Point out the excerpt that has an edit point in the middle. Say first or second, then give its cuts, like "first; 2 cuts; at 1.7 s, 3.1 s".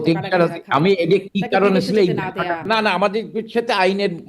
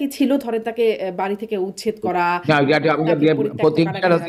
first; 1 cut; at 2.6 s